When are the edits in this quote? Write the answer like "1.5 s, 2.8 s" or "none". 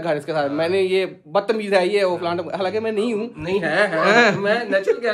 none